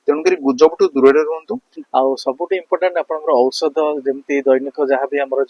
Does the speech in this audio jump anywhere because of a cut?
yes; 1 cut; at 1.5 s

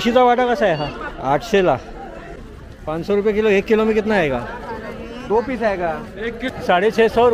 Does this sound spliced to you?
yes; 3 cuts; at 1.1 s, 2.4 s, 6.4 s

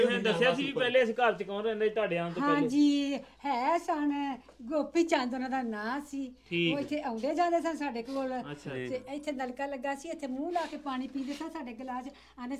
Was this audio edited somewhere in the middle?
no; 0 cuts

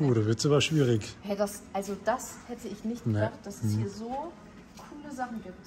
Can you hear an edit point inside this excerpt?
no; 0 cuts

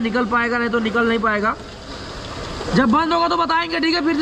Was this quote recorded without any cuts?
yes; 0 cuts

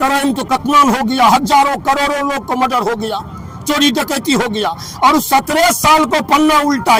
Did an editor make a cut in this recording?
no; 0 cuts

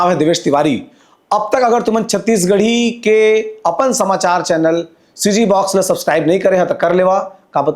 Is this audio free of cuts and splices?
yes; 0 cuts

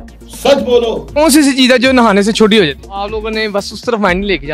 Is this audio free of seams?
no; 2 cuts; at 1.0 s, 2.8 s

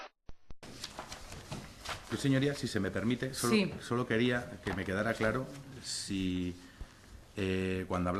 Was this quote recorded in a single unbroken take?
no; 1 cut; at 6.2 s

